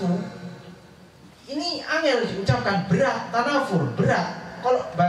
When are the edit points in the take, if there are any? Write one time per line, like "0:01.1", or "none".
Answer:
none